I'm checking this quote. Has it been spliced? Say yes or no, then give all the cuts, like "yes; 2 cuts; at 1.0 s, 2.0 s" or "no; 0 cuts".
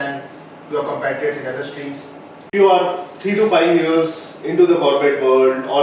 yes; 1 cut; at 2.5 s